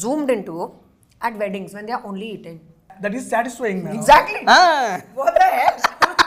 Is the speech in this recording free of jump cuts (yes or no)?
no